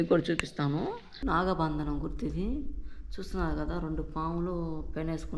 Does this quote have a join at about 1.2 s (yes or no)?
yes